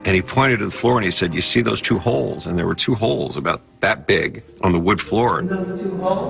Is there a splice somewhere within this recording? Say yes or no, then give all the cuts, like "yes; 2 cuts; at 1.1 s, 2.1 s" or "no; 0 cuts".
yes; 2 cuts; at 4.4 s, 5.4 s